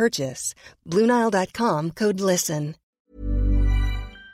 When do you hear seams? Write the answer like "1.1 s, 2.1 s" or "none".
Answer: 3.0 s